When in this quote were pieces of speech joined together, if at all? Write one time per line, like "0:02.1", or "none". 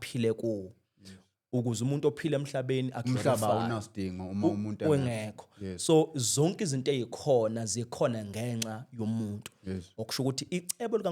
none